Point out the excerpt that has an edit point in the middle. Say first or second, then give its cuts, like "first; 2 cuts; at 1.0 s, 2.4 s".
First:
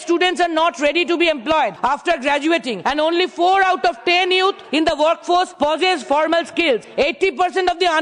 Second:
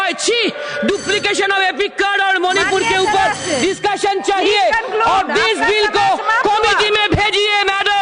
first; 5 cuts; at 1.8 s, 2.7 s, 4.6 s, 5.5 s, 6.9 s